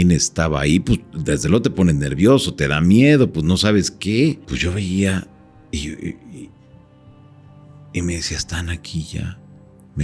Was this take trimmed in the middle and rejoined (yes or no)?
yes